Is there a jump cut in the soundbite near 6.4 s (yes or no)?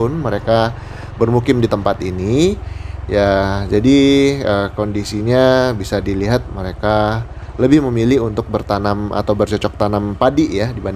no